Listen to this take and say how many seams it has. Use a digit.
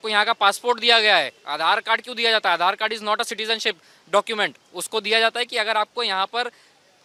0